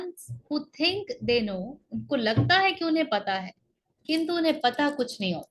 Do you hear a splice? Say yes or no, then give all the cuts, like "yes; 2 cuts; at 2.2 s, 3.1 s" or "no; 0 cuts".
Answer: no; 0 cuts